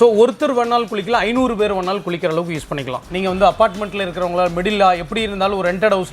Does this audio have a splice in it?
yes; 1 cut; at 3.0 s

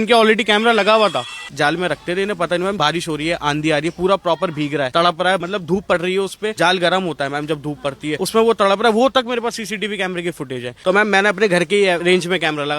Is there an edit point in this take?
yes; 7 cuts; at 1.4 s, 2.8 s, 5.2 s, 6.5 s, 8.2 s, 10.7 s, 12.0 s

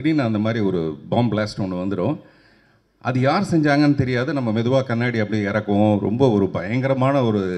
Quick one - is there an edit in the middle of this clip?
no; 0 cuts

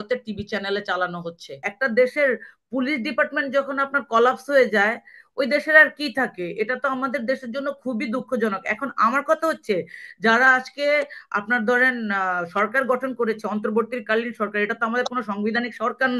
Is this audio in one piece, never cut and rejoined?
no; 1 cut; at 1.7 s

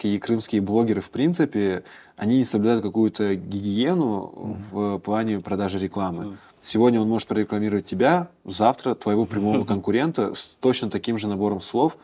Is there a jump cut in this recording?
no; 0 cuts

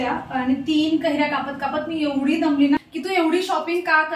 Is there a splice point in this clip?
yes; 1 cut; at 2.8 s

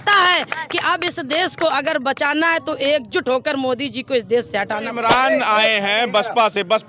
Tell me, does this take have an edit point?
yes; 1 cut; at 4.9 s

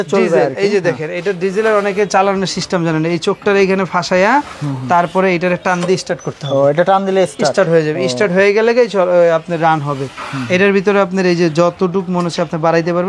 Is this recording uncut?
yes; 0 cuts

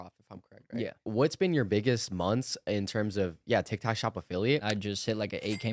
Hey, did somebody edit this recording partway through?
yes; 2 cuts; at 1.0 s, 4.6 s

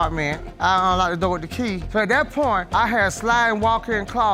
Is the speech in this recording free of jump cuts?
yes; 0 cuts

